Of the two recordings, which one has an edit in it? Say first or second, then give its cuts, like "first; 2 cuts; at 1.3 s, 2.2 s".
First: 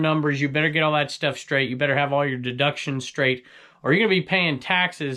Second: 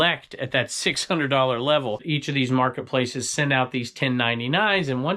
second; 1 cut; at 2.0 s